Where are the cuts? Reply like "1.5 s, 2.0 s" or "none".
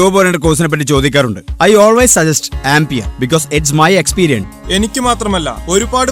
4.5 s